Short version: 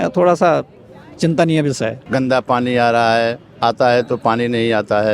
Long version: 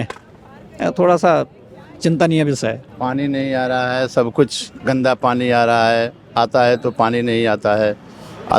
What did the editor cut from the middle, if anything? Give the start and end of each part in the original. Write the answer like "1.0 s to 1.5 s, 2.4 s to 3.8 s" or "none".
2.8 s to 4.7 s